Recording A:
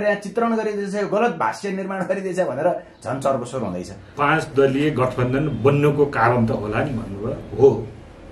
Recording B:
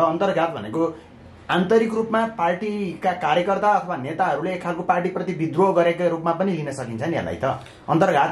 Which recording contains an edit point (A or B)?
A